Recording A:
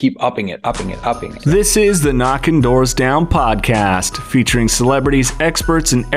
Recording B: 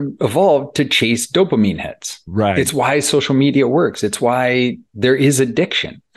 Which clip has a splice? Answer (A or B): A